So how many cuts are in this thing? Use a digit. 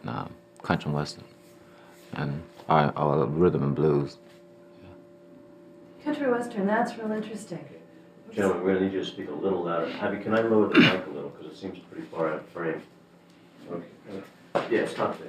1